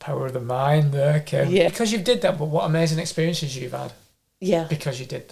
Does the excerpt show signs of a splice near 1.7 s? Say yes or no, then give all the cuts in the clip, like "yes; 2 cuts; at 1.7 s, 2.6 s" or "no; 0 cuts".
yes; 1 cut; at 1.7 s